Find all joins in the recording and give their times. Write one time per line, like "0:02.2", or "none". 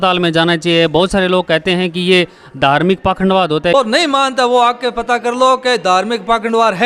0:03.7